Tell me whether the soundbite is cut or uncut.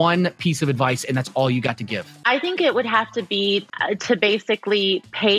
cut